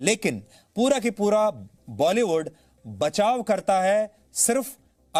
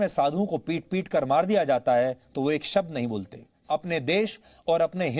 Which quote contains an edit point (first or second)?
second